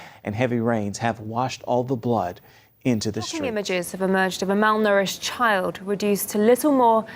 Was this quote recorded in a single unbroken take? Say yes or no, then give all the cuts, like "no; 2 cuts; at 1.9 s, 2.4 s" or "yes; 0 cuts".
no; 1 cut; at 4.9 s